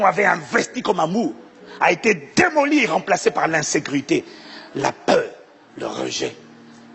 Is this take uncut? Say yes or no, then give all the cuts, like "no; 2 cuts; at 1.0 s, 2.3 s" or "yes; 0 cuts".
yes; 0 cuts